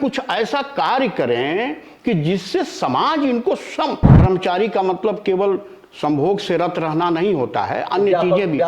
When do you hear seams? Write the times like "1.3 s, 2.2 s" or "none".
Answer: 4.1 s